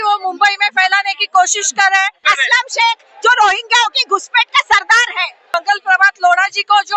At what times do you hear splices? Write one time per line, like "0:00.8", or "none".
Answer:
0:02.2
0:05.4